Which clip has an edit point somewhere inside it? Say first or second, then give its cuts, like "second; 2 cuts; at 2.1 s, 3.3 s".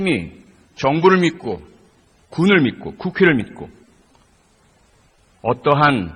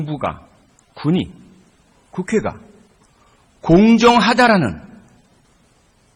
second; 1 cut; at 2.6 s